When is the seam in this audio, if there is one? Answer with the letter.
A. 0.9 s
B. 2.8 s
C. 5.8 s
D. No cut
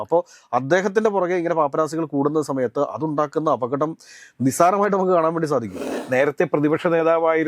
C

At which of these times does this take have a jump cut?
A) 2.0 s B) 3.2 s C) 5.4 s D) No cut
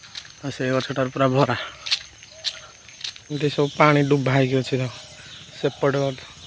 B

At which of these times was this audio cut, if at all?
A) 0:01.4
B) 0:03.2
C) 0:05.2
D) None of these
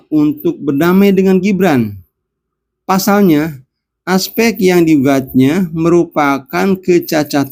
D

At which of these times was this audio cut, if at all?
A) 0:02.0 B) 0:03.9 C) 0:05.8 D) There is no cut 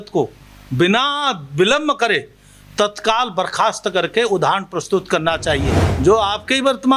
C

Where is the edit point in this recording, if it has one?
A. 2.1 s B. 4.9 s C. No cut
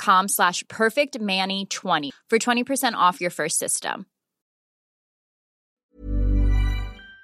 A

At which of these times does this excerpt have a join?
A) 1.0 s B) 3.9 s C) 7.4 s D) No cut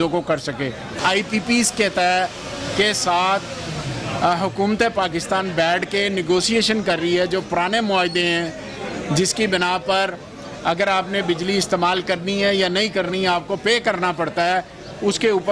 D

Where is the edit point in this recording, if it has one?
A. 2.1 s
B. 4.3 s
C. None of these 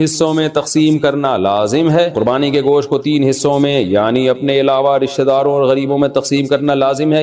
A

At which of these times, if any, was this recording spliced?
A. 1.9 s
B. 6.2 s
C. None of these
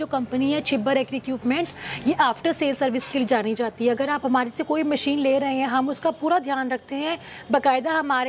C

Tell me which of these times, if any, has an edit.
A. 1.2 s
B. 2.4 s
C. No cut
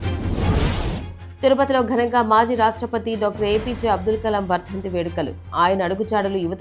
A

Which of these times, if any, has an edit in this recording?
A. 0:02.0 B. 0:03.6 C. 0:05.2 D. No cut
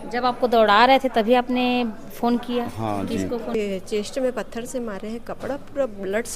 B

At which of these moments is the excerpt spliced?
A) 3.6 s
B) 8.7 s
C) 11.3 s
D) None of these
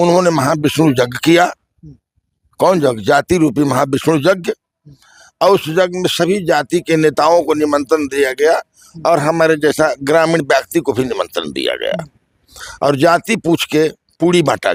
D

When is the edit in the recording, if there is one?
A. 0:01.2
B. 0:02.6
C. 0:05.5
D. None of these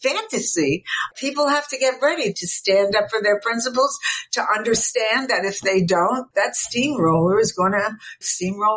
A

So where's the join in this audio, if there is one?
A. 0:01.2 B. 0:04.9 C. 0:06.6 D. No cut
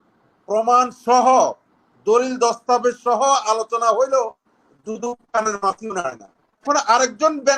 C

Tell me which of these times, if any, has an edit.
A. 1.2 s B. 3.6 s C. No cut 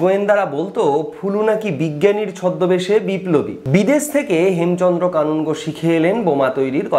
B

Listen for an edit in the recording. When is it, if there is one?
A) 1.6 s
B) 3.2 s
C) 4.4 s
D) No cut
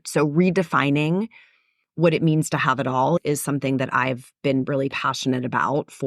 B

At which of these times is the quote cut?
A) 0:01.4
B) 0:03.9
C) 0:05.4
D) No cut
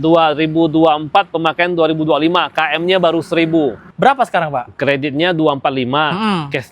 B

